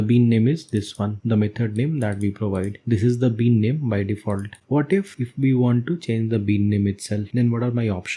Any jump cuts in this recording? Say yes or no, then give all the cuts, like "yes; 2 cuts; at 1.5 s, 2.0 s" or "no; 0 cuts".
yes; 2 cuts; at 1.2 s, 7.3 s